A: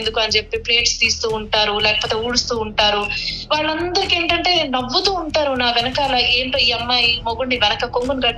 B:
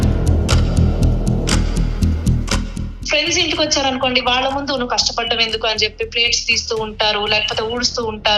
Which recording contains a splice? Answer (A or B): B